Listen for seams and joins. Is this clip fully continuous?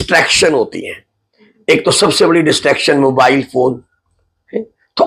yes; 0 cuts

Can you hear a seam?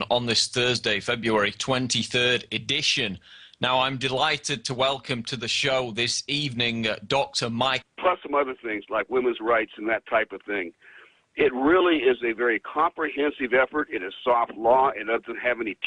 no; 0 cuts

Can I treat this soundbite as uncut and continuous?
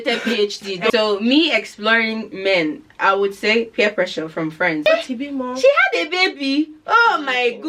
no; 2 cuts; at 0.9 s, 4.9 s

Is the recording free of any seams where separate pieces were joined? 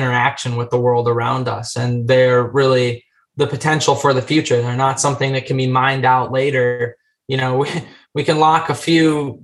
yes; 0 cuts

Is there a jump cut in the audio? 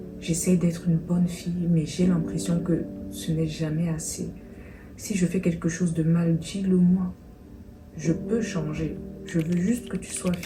no; 0 cuts

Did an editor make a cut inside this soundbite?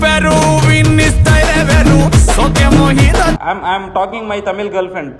yes; 1 cut; at 3.4 s

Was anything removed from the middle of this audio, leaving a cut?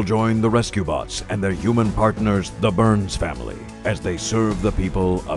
no; 0 cuts

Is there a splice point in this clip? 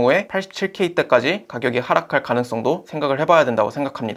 no; 0 cuts

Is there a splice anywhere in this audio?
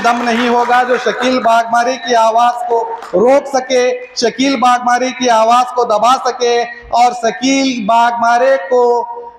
no; 0 cuts

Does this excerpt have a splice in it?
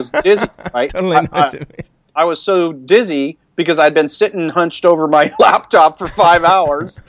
yes; 1 cut; at 2.0 s

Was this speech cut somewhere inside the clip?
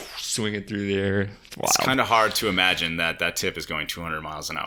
no; 0 cuts

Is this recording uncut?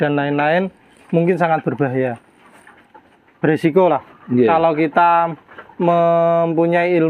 yes; 0 cuts

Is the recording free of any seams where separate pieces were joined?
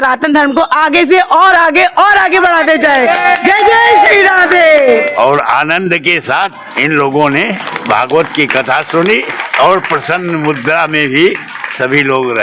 no; 4 cuts; at 5.1 s, 6.6 s, 7.7 s, 9.4 s

